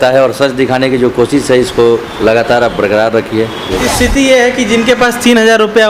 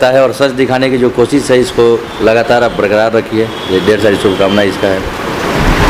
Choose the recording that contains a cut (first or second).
first